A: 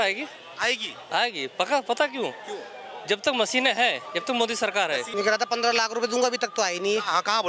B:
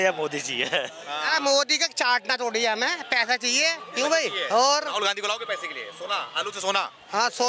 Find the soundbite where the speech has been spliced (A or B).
A